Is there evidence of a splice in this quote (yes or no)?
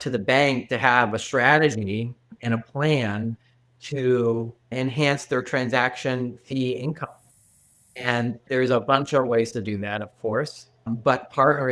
yes